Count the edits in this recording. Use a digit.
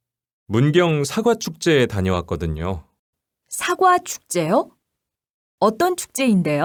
0